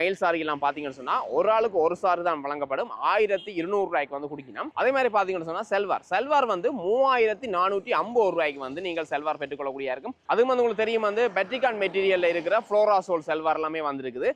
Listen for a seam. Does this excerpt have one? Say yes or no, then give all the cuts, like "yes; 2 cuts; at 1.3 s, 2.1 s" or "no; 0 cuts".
no; 0 cuts